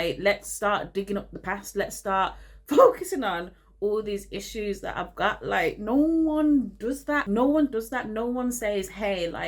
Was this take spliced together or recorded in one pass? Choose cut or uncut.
uncut